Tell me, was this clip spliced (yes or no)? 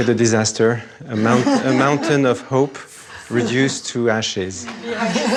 no